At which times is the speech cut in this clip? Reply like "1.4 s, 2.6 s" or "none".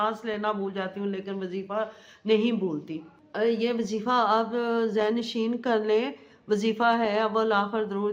none